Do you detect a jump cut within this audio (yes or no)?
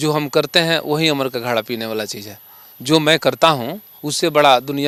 no